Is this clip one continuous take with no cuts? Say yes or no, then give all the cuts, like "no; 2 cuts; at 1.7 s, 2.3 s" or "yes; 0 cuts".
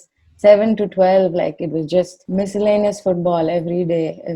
yes; 0 cuts